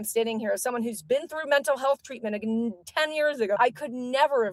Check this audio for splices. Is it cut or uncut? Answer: cut